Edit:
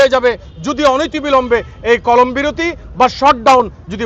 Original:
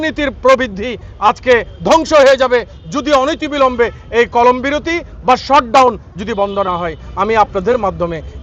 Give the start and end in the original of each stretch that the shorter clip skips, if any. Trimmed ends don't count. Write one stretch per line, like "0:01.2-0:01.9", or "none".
none